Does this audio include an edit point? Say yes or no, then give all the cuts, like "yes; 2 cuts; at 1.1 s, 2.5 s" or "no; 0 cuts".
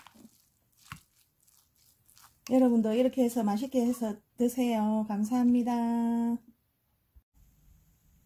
yes; 1 cut; at 7.3 s